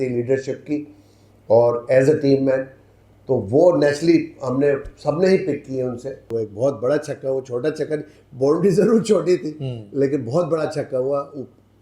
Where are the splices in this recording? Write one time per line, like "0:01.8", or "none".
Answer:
0:06.3